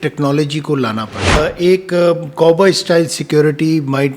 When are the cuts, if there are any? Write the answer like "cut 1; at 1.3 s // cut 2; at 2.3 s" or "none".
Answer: cut 1; at 1.4 s